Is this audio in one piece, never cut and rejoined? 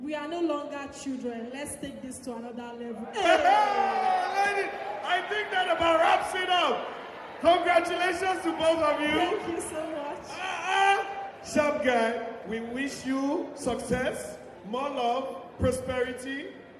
yes; 0 cuts

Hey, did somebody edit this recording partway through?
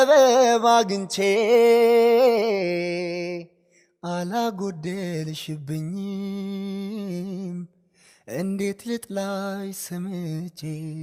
no; 0 cuts

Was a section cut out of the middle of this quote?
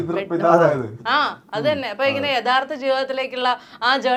no; 0 cuts

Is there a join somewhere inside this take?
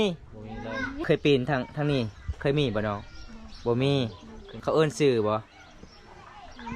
yes; 2 cuts; at 1.0 s, 4.5 s

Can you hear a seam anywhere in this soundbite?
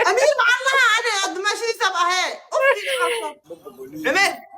yes; 1 cut; at 3.4 s

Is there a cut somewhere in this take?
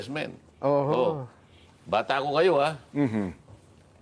no; 0 cuts

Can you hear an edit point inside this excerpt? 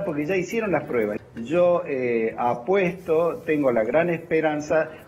yes; 1 cut; at 1.2 s

